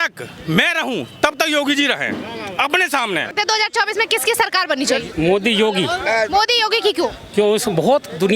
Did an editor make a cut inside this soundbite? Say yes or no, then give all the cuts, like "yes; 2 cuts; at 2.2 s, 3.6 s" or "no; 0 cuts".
no; 0 cuts